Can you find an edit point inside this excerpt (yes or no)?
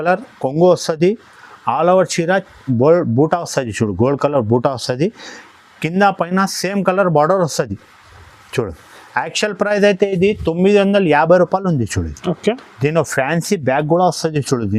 no